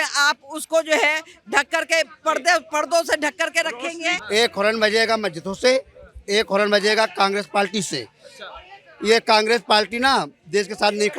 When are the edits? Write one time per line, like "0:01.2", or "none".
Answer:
0:04.1